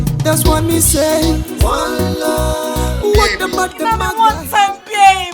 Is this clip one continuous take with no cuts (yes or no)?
no